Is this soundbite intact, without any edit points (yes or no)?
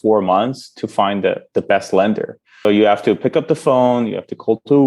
no